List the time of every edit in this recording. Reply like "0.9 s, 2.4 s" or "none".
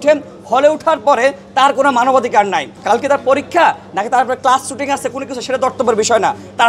2.7 s